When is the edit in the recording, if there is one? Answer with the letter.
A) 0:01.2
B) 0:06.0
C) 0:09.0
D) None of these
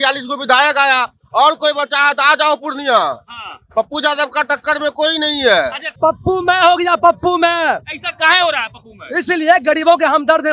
B